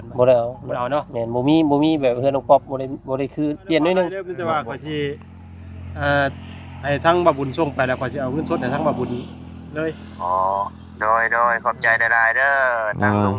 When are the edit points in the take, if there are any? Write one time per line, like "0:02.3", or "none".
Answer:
0:04.3